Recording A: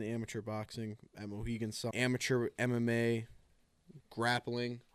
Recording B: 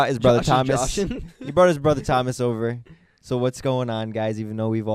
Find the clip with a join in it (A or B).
A